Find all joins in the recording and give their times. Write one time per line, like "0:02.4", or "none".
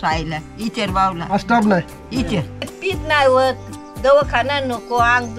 0:02.6